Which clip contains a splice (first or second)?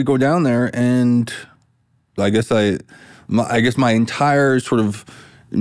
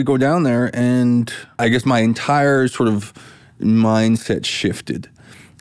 second